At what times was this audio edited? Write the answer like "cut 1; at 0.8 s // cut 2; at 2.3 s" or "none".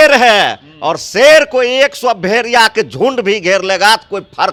none